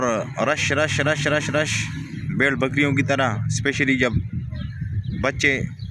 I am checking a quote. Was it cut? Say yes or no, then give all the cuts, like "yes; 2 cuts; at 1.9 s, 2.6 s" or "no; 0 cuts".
no; 0 cuts